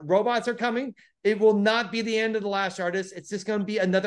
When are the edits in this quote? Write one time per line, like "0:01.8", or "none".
none